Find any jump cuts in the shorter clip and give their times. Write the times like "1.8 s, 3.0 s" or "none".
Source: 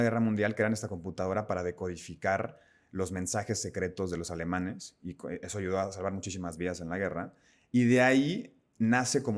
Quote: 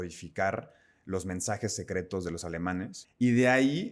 3.0 s